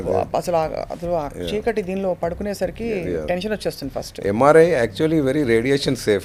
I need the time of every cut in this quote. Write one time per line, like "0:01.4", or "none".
none